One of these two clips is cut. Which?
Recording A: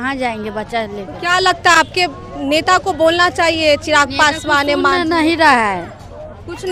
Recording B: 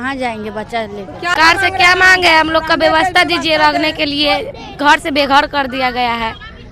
B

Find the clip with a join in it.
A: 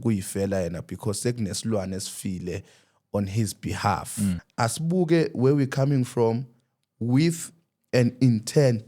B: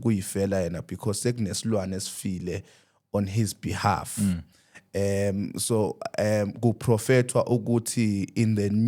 A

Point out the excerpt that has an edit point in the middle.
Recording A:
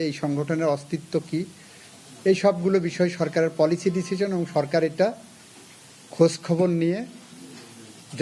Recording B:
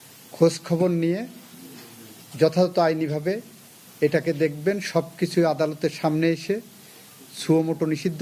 B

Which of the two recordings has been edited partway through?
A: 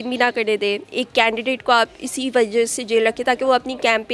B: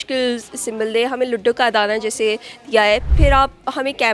B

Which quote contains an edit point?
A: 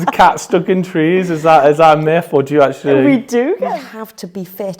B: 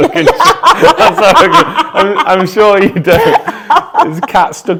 A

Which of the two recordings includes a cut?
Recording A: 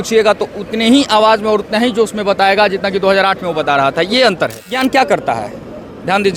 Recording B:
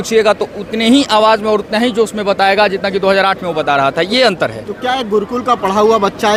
A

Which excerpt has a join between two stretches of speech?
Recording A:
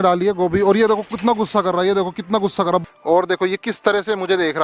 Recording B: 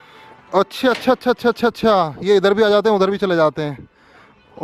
A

